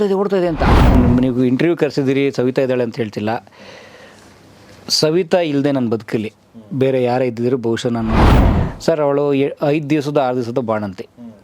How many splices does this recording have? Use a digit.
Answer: 2